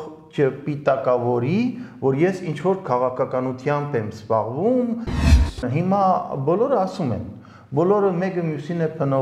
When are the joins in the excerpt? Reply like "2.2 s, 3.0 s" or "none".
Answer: 5.3 s